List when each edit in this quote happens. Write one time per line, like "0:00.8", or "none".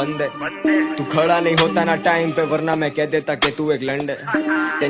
none